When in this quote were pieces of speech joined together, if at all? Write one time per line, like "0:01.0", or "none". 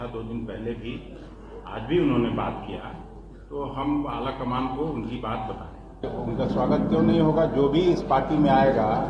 0:06.0